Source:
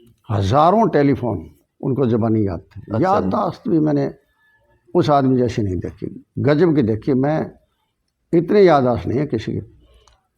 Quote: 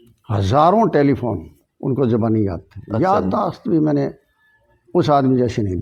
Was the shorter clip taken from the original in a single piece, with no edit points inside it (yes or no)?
yes